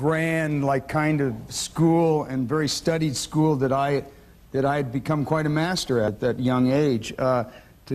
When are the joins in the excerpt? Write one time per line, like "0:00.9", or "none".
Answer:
none